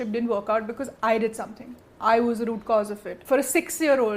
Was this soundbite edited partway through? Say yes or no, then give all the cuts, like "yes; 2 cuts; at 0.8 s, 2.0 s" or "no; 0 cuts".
yes; 1 cut; at 3.1 s